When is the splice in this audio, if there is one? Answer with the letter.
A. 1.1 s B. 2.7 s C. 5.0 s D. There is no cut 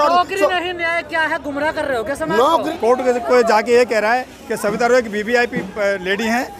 B